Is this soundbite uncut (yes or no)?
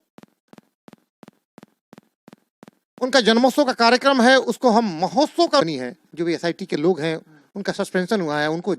no